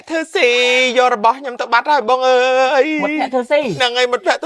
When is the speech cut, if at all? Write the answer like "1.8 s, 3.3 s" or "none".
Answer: none